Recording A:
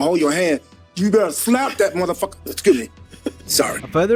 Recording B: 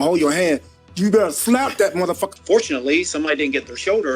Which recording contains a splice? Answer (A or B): B